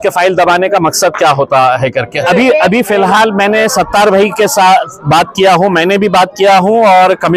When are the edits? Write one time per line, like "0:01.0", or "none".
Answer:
0:02.2